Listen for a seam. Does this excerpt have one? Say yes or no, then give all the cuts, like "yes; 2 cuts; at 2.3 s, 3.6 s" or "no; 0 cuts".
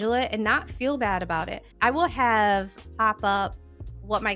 no; 0 cuts